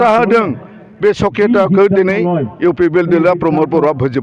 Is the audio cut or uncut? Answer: uncut